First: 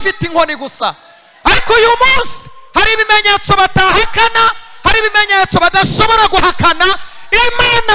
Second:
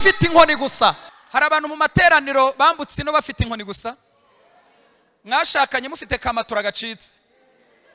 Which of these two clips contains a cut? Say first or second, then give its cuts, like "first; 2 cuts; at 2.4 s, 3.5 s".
second; 1 cut; at 1.1 s